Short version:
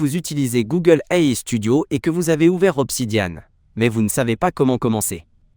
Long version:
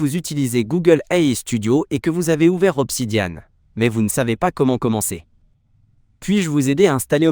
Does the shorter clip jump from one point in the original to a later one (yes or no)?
no